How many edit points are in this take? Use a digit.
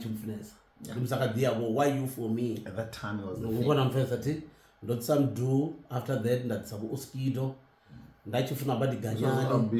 0